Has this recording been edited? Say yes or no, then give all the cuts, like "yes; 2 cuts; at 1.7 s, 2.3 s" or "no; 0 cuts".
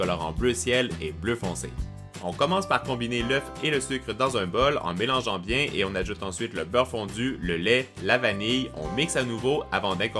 yes; 1 cut; at 1.2 s